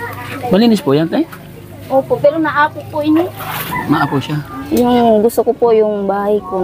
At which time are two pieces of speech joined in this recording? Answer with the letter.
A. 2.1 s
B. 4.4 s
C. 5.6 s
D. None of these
B